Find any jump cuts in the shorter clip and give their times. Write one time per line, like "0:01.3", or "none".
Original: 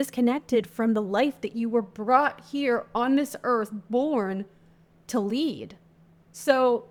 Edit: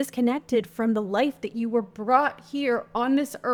none